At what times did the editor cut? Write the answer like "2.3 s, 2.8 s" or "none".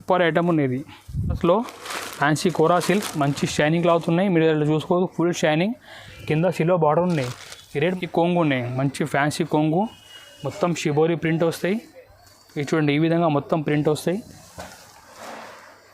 1.4 s, 7.9 s

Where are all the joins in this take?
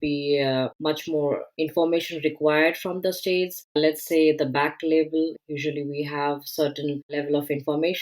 5.4 s

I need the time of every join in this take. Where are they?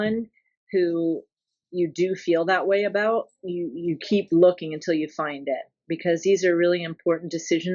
none

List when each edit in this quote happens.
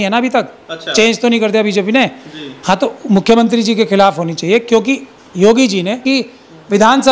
6.0 s

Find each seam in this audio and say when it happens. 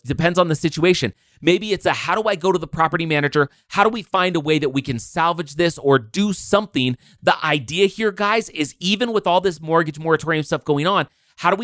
none

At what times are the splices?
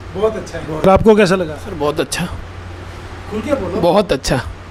none

